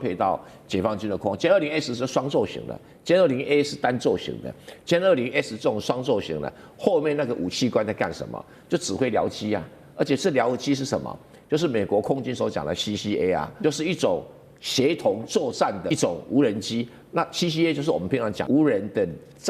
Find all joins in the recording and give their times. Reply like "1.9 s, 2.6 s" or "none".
13.5 s, 15.8 s, 18.4 s